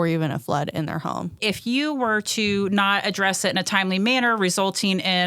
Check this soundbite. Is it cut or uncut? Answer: cut